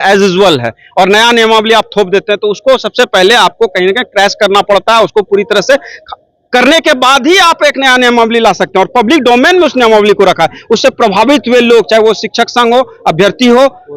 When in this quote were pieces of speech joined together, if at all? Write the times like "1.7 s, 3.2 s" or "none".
none